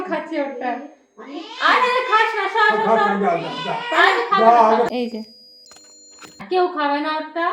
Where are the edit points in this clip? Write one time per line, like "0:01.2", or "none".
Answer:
0:04.9
0:06.4